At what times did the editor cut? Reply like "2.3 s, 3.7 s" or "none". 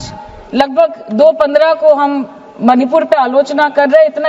none